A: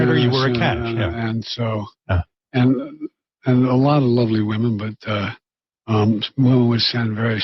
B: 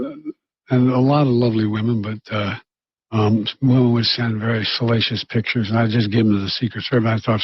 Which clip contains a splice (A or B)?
B